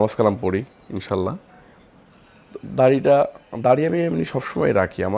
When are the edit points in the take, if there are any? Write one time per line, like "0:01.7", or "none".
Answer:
none